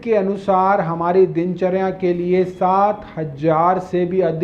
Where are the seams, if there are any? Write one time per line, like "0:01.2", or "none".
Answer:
none